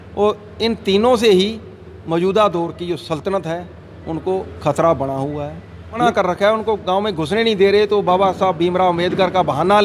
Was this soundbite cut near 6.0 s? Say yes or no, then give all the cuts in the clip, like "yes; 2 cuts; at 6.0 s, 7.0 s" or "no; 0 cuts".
yes; 1 cut; at 6.0 s